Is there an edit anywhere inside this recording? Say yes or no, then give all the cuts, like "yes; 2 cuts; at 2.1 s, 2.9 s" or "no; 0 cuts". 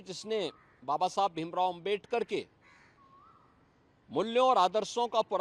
no; 0 cuts